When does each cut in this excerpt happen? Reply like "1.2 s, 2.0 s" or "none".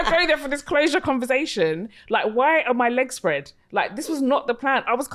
none